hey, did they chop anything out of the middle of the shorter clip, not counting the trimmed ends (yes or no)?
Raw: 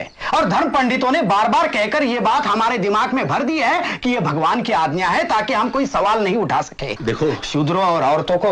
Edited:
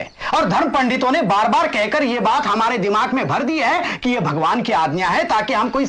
no